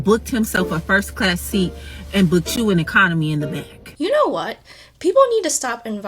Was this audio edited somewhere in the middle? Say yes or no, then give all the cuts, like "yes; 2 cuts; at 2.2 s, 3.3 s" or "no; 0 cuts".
yes; 1 cut; at 3.9 s